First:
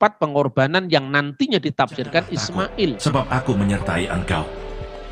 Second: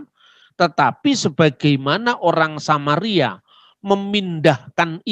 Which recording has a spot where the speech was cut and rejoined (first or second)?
first